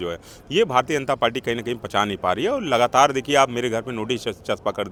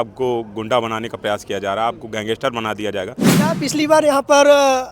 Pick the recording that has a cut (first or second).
second